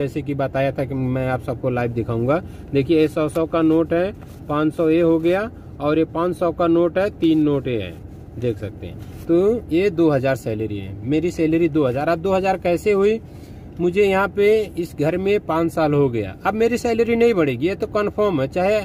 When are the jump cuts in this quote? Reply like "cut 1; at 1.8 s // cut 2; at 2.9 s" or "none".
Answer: none